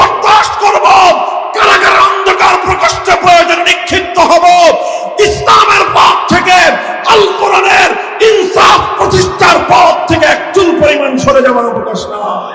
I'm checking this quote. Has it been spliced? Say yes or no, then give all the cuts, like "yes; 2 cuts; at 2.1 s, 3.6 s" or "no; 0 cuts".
no; 0 cuts